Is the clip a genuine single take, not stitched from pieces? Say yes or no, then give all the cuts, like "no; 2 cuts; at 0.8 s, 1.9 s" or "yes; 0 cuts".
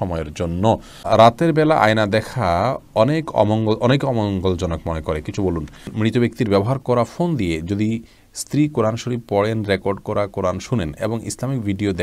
no; 2 cuts; at 1.1 s, 5.8 s